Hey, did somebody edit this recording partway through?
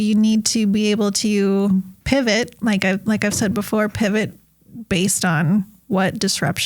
yes; 1 cut; at 2.0 s

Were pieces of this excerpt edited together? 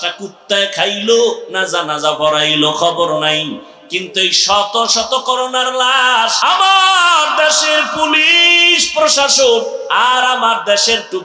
yes; 1 cut; at 6.4 s

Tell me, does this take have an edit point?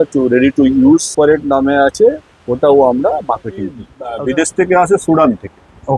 yes; 2 cuts; at 1.1 s, 3.9 s

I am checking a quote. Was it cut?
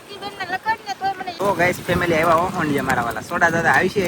yes; 1 cut; at 1.4 s

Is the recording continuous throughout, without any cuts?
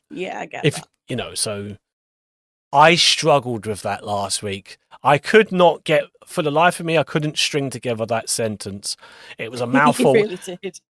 no; 1 cut; at 2.6 s

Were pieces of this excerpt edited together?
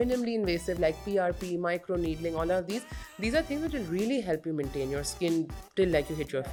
no; 0 cuts

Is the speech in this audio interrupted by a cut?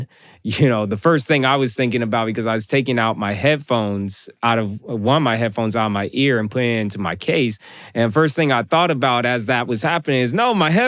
no; 0 cuts

